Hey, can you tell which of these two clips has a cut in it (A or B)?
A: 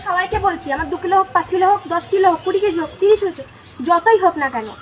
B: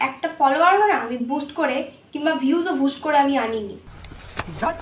B